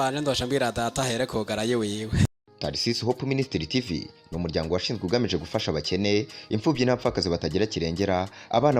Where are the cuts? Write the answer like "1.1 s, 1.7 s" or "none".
2.3 s